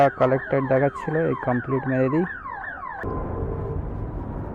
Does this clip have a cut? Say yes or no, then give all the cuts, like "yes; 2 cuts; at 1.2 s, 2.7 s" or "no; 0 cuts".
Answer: yes; 1 cut; at 3.0 s